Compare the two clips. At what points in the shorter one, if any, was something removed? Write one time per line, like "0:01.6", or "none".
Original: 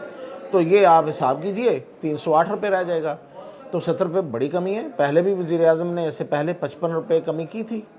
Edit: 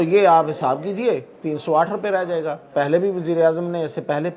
0:02.6